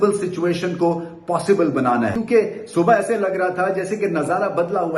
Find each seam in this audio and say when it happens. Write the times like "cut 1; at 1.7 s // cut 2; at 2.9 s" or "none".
cut 1; at 2.2 s